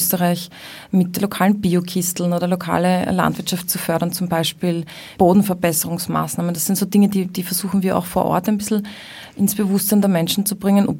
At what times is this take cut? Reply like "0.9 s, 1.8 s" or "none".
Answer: 1.2 s, 5.0 s